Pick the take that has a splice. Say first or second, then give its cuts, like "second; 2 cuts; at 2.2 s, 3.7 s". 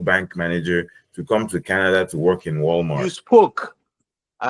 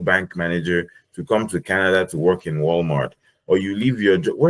first; 1 cut; at 2.9 s